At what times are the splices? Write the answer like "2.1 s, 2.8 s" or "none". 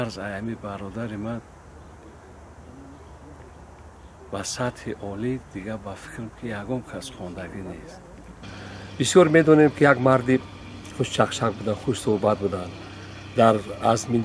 8.4 s